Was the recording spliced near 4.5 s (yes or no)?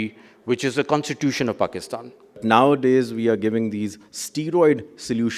no